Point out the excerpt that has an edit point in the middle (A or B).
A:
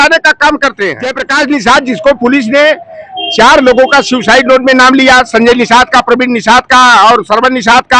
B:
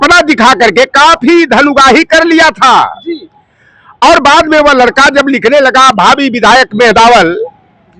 A